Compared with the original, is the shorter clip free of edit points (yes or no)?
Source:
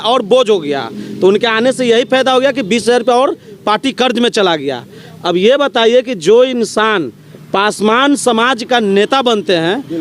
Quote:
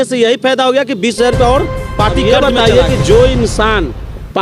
no